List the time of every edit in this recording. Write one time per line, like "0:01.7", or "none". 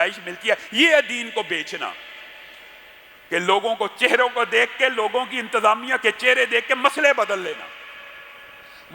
none